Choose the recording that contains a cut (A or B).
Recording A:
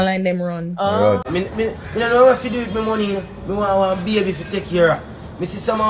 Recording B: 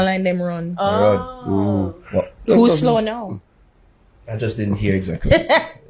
A